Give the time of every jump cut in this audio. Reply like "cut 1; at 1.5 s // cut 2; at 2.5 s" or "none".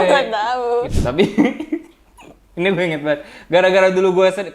cut 1; at 0.9 s